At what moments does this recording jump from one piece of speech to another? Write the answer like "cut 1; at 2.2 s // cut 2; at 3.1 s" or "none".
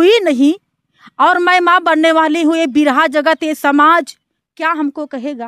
none